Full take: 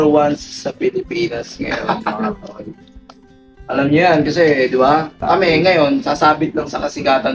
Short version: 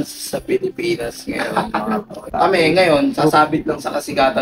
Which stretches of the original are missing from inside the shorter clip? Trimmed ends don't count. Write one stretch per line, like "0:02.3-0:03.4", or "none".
0:02.6-0:05.1